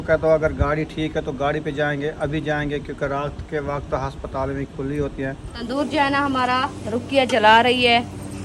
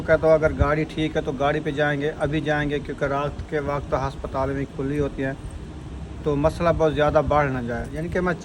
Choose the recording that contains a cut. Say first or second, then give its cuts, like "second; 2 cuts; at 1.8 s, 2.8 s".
first; 1 cut; at 5.6 s